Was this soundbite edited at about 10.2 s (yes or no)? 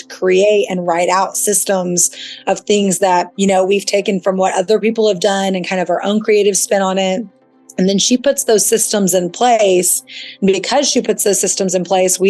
no